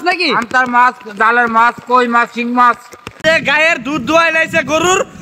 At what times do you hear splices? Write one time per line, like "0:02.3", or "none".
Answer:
0:03.2